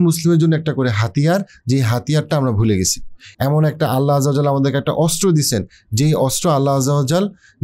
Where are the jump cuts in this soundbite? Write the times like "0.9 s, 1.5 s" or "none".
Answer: none